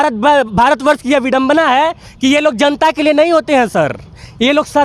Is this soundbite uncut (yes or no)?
yes